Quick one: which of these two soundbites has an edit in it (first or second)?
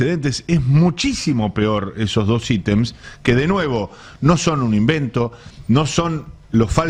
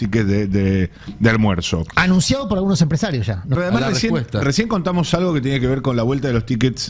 second